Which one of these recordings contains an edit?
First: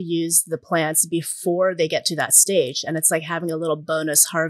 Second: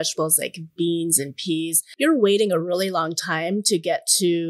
second; 1 cut; at 1.8 s

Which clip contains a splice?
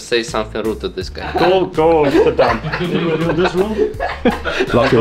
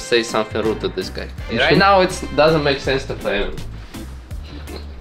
first; 1 cut; at 1.3 s

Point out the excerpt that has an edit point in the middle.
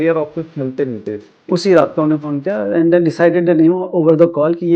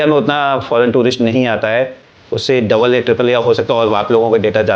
first; 1 cut; at 1.4 s

